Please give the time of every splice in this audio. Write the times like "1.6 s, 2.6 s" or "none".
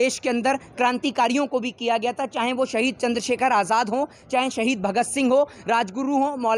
none